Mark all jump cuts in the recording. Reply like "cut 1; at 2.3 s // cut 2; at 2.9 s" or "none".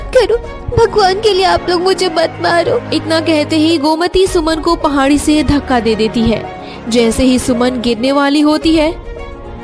cut 1; at 2.9 s